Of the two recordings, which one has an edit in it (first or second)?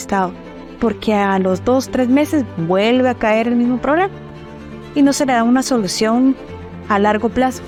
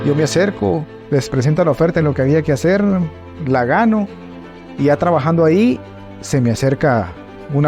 second